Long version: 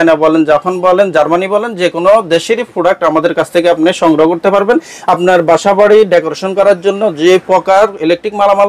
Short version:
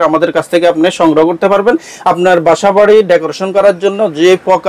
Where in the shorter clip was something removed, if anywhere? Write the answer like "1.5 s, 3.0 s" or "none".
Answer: none